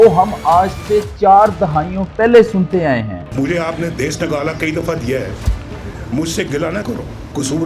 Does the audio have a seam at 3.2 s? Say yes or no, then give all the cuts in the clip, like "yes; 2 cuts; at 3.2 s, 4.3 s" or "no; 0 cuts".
yes; 1 cut; at 3.2 s